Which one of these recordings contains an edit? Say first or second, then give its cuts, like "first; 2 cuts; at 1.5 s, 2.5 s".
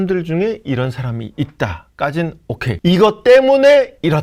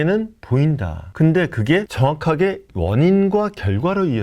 second; 1 cut; at 2.7 s